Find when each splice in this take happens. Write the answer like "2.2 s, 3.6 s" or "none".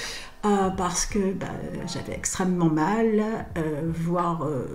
none